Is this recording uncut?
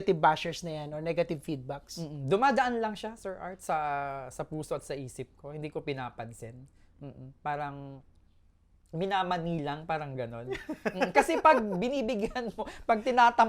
yes; 0 cuts

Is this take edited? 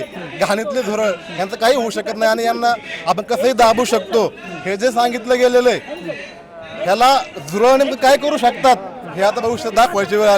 no; 0 cuts

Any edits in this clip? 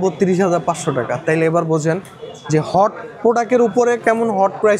no; 0 cuts

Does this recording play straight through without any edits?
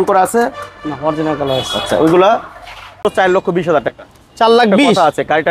no; 1 cut; at 3.0 s

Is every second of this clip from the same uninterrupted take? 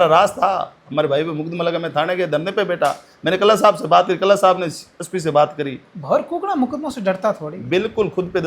yes; 0 cuts

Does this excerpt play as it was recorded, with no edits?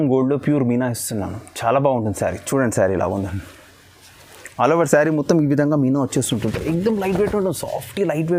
yes; 0 cuts

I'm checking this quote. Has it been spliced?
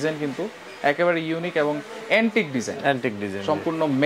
no; 0 cuts

